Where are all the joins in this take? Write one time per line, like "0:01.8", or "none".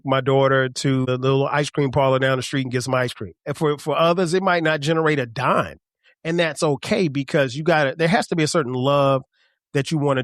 0:01.0
0:03.5